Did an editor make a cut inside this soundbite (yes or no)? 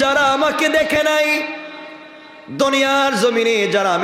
no